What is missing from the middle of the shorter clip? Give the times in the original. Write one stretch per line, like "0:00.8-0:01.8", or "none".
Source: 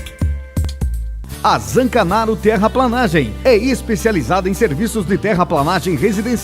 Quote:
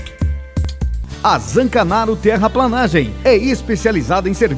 0:01.0-0:01.2